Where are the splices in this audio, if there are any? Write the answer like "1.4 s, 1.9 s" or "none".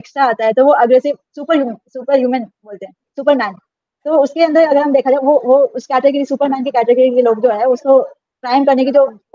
none